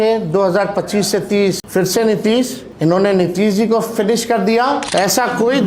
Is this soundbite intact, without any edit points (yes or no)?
no